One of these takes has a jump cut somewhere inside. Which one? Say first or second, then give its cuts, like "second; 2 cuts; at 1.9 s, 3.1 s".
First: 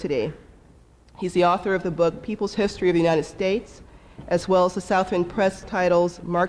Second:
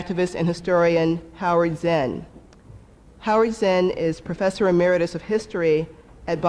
first; 1 cut; at 3.3 s